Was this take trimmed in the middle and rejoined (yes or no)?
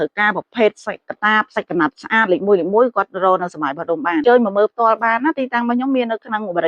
yes